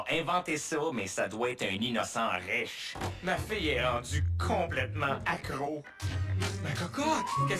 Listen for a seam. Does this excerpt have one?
no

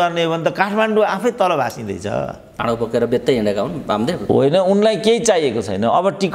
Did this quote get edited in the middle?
yes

